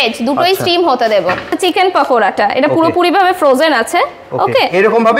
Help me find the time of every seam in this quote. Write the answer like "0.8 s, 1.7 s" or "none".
1.5 s